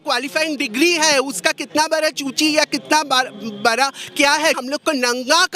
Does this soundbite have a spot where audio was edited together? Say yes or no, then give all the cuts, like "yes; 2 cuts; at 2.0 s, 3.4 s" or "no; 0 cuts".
yes; 1 cut; at 4.6 s